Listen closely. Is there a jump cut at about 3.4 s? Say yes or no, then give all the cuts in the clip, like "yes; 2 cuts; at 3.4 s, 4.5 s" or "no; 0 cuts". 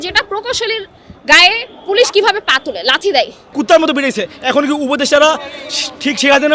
yes; 1 cut; at 3.4 s